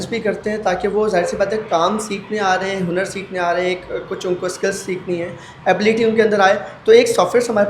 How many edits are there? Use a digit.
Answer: 0